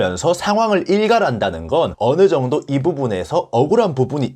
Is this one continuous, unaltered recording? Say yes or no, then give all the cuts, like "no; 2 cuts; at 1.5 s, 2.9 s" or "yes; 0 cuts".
no; 1 cut; at 1.9 s